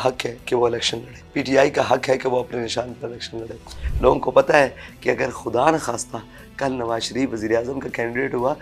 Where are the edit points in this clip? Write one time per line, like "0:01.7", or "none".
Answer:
0:01.2
0:03.8